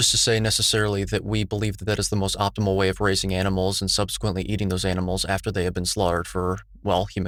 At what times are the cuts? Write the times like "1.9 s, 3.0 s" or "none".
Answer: none

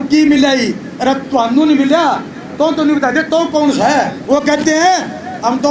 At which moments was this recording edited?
4.2 s

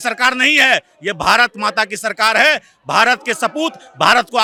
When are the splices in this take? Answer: none

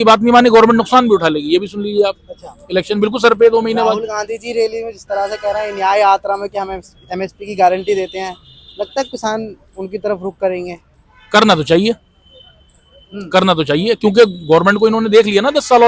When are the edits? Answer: none

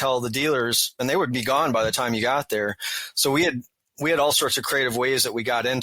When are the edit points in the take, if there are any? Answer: 0.9 s

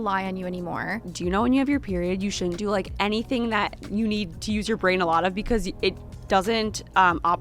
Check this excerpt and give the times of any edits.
1.1 s, 2.9 s

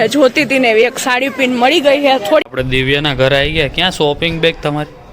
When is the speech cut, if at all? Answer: 2.5 s

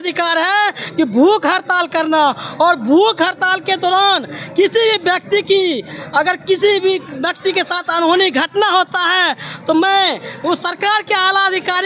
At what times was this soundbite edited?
none

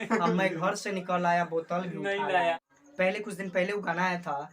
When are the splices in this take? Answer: 2.8 s

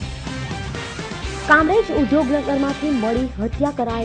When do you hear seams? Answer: 0.9 s

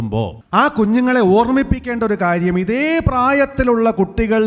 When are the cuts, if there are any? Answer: none

